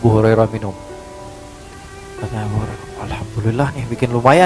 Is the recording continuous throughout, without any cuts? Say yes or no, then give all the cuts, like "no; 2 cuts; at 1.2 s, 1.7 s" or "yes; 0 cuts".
yes; 0 cuts